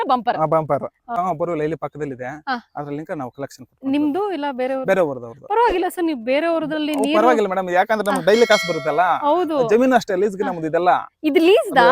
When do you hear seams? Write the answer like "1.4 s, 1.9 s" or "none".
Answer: 1.0 s